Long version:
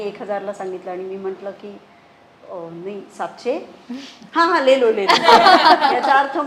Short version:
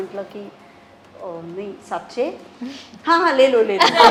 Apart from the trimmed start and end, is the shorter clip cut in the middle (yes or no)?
no